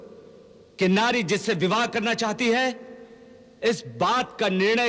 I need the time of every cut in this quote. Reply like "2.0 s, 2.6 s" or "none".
none